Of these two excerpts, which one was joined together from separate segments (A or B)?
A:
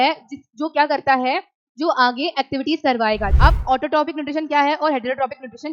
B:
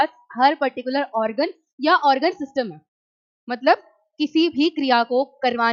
A